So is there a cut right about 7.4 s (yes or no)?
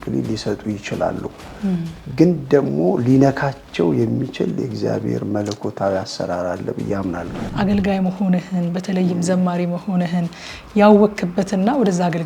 yes